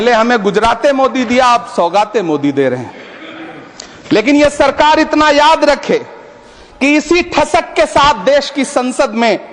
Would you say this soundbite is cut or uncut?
uncut